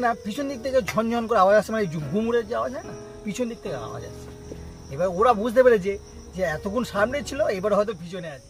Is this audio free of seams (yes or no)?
yes